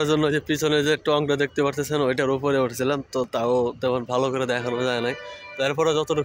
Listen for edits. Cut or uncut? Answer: uncut